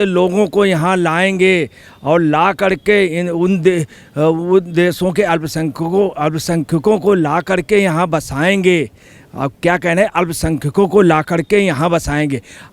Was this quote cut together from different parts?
no; 0 cuts

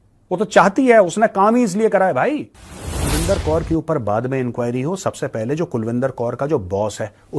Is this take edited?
yes; 1 cut; at 3.1 s

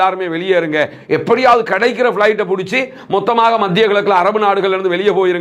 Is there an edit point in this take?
no; 0 cuts

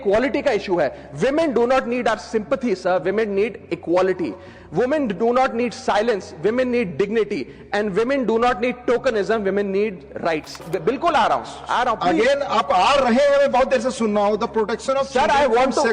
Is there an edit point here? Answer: yes; 1 cut; at 10.6 s

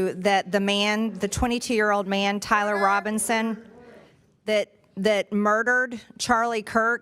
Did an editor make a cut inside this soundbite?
no; 0 cuts

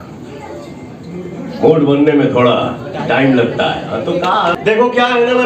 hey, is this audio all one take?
no; 1 cut; at 4.6 s

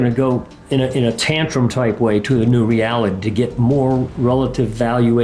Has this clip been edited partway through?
no; 0 cuts

